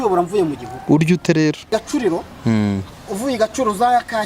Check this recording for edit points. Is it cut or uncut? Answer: cut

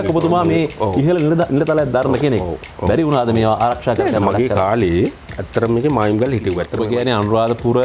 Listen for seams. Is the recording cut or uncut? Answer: cut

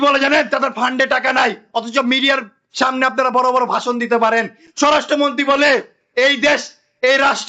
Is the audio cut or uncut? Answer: uncut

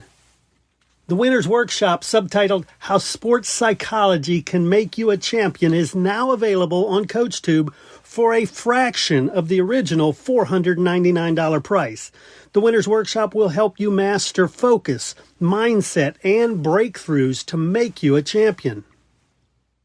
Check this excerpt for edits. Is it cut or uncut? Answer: uncut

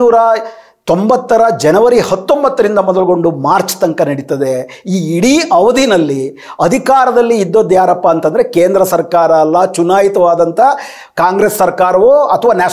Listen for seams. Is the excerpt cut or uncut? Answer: uncut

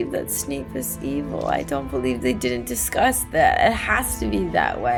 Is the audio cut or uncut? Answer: uncut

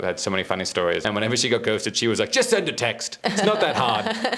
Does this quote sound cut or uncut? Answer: cut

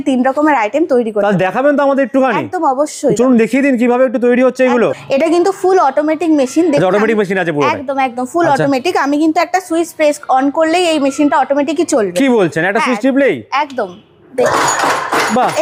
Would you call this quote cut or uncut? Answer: uncut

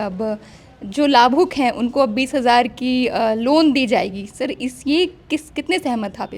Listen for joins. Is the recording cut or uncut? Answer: uncut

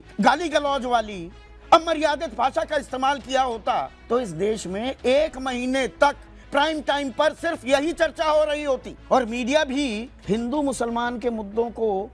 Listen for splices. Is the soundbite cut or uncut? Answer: cut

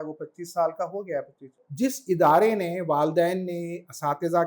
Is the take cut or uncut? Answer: cut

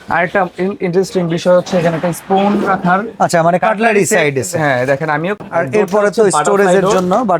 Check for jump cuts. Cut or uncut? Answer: cut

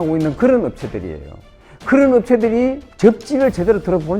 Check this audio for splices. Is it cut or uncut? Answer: cut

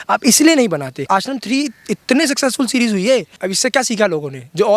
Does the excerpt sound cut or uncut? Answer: cut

